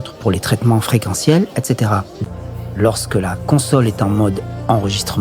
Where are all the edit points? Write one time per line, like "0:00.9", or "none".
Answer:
0:02.1